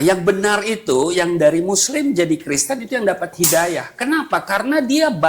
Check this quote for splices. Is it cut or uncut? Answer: uncut